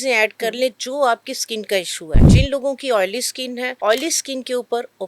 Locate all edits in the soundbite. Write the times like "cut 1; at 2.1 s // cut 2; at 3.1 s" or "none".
cut 1; at 2.3 s // cut 2; at 3.7 s